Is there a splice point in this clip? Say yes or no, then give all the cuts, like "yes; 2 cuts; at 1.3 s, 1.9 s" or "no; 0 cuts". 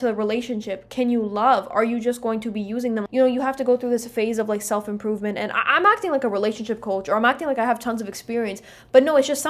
no; 0 cuts